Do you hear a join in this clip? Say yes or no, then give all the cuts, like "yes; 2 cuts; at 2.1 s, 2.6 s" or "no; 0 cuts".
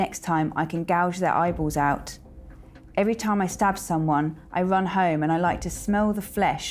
no; 0 cuts